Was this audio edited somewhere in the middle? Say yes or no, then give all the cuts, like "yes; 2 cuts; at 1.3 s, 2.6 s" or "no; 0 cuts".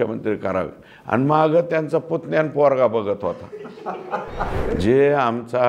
yes; 1 cut; at 4.6 s